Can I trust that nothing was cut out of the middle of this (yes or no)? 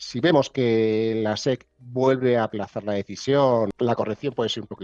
no